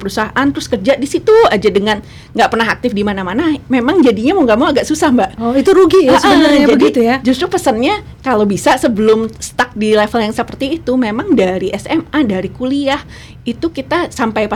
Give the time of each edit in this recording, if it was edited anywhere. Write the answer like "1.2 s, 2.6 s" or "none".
none